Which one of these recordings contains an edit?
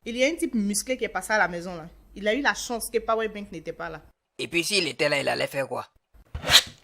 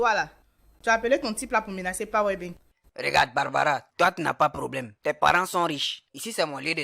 first; 1 cut; at 5.9 s

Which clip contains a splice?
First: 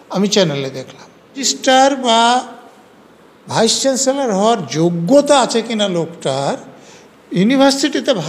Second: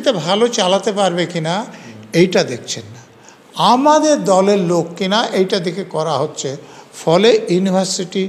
first; 1 cut; at 1.5 s

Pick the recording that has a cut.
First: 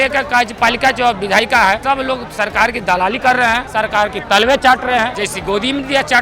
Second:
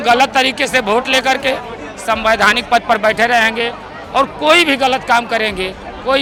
first; 3 cuts; at 1.8 s, 3.6 s, 5.1 s

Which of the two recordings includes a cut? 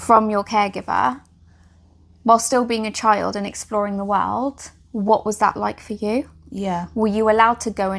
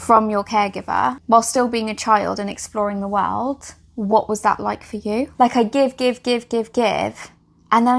second; 2 cuts; at 1.2 s, 5.3 s

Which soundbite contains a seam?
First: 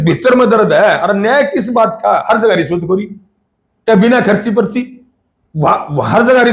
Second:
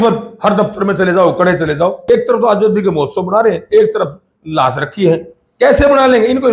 second; 1 cut; at 2.0 s

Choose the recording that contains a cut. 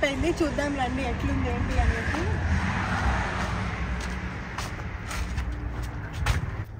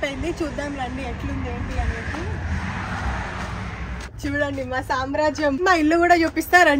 second; 2 cuts; at 4.1 s, 5.6 s

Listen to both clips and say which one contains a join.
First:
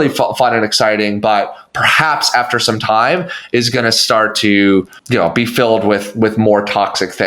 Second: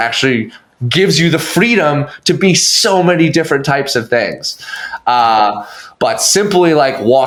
first; 1 cut; at 5.0 s

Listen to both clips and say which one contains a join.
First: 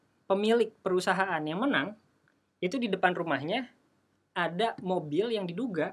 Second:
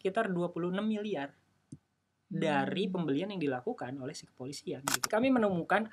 second; 1 cut; at 5.0 s

